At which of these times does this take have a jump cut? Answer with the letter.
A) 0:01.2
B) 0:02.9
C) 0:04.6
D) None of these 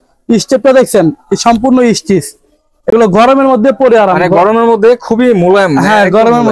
D